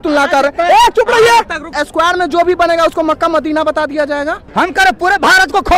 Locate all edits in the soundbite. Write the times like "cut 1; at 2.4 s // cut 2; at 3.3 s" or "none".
cut 1; at 1.8 s // cut 2; at 4.4 s